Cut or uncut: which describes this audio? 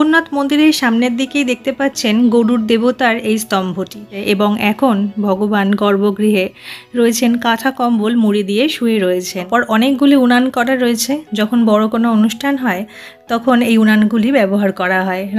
cut